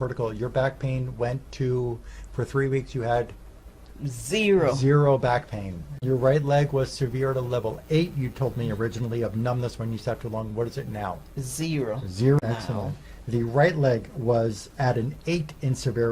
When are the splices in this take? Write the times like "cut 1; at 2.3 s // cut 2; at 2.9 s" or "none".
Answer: cut 1; at 6.0 s // cut 2; at 12.4 s